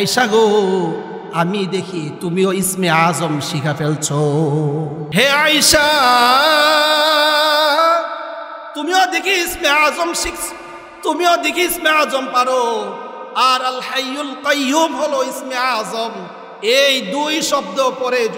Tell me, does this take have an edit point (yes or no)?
yes